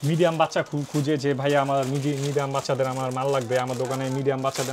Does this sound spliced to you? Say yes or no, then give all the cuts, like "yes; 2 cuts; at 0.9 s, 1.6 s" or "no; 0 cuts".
no; 0 cuts